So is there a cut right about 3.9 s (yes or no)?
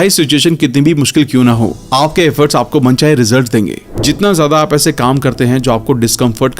yes